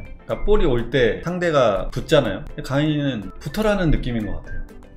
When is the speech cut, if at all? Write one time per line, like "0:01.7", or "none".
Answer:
0:01.2
0:01.9

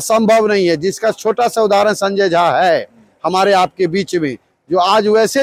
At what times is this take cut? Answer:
none

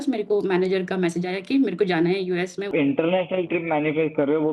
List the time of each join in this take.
0:02.7

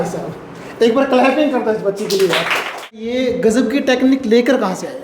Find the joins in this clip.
0:02.9

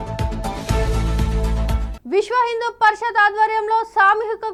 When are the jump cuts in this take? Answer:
none

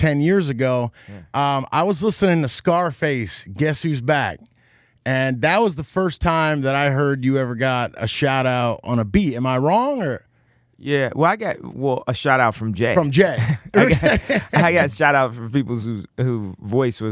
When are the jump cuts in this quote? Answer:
none

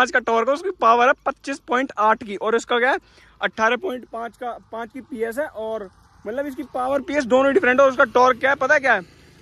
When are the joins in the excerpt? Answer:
none

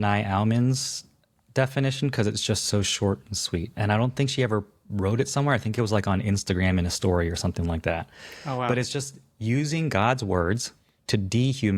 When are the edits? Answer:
none

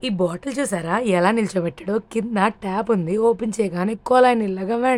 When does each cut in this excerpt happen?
none

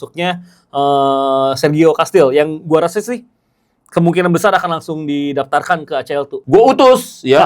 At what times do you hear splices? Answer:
0:06.3

